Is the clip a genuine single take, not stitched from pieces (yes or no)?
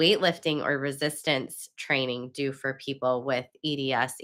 yes